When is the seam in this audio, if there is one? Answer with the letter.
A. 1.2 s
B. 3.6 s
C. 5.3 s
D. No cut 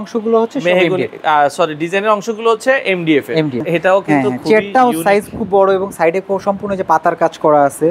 B